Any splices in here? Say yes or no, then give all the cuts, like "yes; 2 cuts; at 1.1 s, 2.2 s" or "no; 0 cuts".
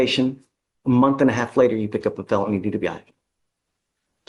no; 0 cuts